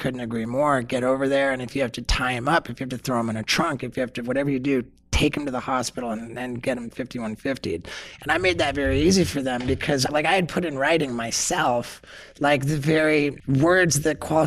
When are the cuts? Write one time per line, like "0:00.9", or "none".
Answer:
0:10.1
0:13.4